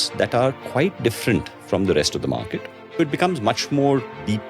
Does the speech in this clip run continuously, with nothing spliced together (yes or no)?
no